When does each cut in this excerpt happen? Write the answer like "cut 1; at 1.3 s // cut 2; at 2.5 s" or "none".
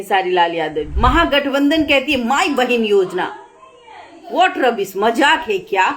cut 1; at 0.9 s